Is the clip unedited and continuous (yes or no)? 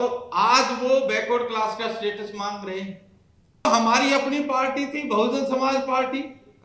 no